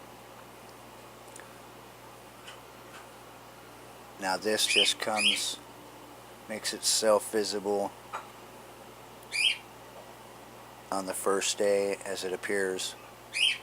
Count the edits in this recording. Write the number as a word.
one